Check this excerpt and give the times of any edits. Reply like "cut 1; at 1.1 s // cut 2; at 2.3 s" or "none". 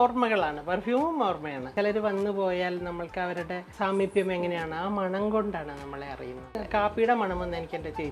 cut 1; at 1.7 s // cut 2; at 3.7 s // cut 3; at 6.6 s